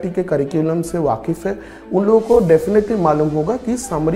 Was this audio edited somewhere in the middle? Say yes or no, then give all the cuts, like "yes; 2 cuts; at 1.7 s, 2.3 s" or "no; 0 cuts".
no; 0 cuts